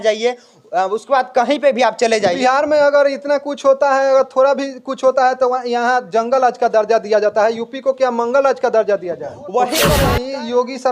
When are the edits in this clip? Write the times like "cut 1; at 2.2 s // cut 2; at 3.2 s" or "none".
cut 1; at 10.0 s